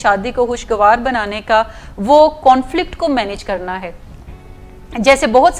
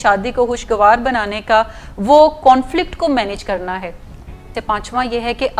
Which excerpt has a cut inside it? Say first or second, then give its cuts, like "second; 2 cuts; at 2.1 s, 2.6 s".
second; 1 cut; at 4.5 s